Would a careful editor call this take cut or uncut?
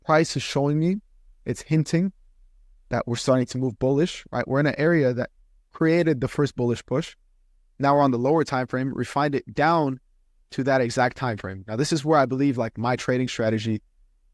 uncut